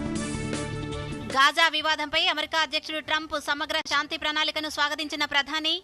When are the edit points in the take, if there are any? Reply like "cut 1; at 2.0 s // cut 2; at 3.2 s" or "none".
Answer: cut 1; at 1.0 s